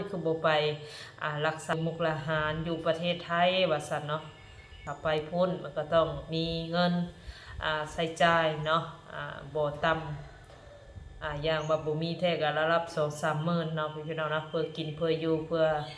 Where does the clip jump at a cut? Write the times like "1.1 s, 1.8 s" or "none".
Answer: 1.7 s, 4.8 s